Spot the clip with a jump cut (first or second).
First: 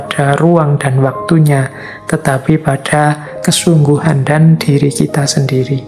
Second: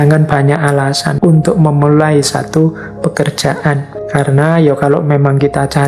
second